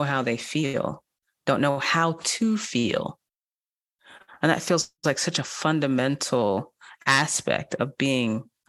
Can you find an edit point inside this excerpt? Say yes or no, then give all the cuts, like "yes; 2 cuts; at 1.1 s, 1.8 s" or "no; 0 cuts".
no; 0 cuts